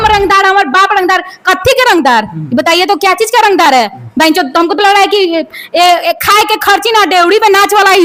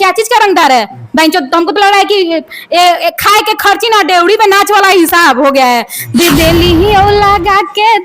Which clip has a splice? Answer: second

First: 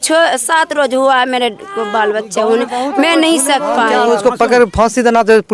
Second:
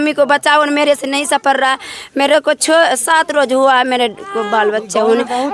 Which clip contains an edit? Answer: first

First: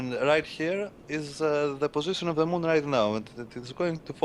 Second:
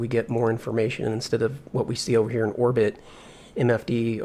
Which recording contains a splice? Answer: first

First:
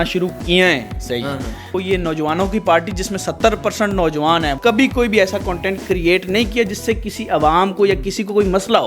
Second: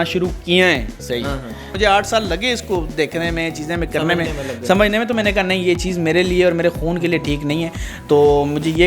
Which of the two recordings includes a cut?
first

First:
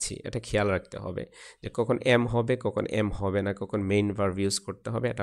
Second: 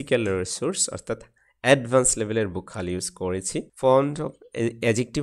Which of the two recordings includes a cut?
second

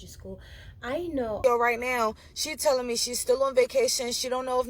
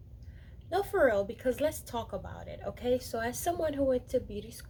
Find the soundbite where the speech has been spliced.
first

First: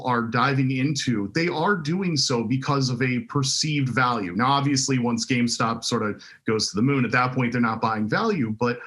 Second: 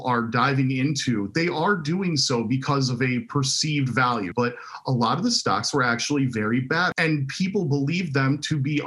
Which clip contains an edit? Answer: second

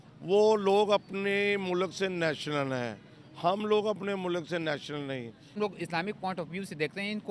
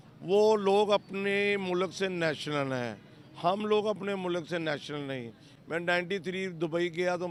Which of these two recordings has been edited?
first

